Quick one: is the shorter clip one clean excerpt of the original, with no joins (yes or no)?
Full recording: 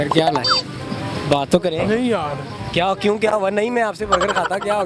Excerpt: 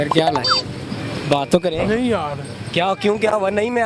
yes